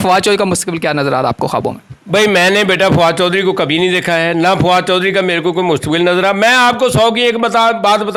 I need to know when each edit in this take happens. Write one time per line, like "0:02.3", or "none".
none